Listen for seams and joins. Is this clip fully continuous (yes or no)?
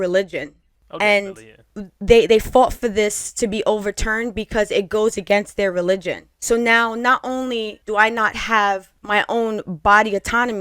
no